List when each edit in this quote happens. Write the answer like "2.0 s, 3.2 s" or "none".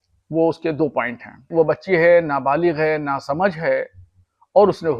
1.5 s